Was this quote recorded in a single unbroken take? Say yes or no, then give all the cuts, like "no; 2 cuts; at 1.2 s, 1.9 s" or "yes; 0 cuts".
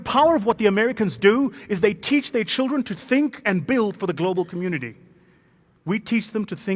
yes; 0 cuts